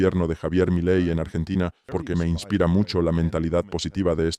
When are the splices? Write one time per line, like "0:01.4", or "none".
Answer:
0:01.8